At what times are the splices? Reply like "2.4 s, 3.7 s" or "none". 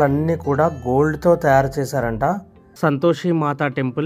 2.6 s